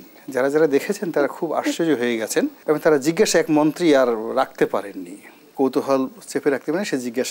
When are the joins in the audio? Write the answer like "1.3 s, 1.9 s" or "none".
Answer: 2.6 s, 5.5 s